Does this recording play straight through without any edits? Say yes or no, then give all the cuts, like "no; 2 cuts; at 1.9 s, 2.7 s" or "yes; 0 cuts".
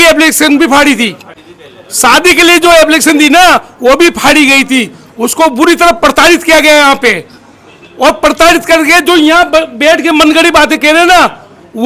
yes; 0 cuts